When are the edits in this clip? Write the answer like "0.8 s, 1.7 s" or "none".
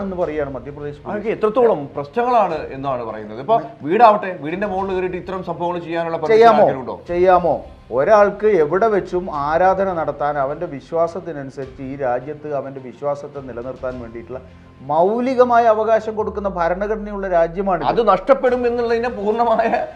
none

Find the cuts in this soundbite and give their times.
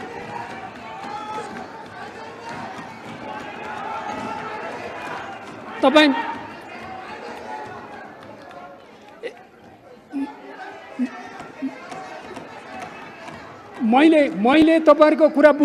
none

